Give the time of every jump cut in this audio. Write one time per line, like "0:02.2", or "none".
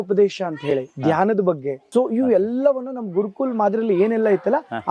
0:01.8

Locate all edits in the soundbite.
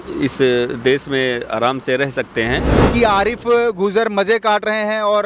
0:02.8

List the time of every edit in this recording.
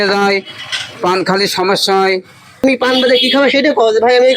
0:02.6

